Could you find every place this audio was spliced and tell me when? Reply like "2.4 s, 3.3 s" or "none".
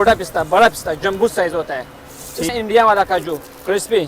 2.5 s